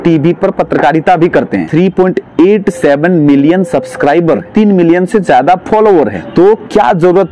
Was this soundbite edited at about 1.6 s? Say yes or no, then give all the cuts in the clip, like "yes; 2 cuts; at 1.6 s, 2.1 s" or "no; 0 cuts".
yes; 3 cuts; at 1.6 s, 4.5 s, 6.2 s